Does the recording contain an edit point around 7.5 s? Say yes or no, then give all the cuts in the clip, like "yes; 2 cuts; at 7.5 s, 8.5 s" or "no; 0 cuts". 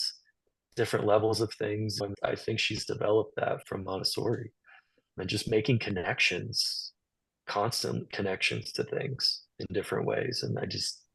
no; 3 cuts; at 2.1 s, 3.6 s, 5.1 s